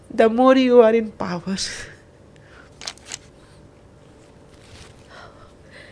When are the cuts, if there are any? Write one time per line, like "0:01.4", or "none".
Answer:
0:03.9